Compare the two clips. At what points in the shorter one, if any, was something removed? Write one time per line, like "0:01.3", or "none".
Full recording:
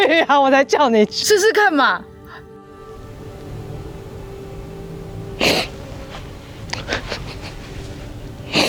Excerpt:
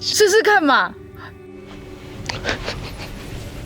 0:01.7